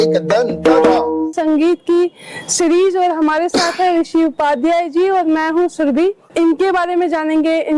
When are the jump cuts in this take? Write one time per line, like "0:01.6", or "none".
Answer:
0:01.3
0:06.3